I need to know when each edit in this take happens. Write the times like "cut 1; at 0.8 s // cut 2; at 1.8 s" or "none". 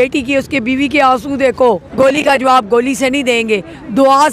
cut 1; at 1.9 s